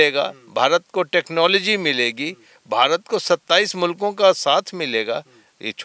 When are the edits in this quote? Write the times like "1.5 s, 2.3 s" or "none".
none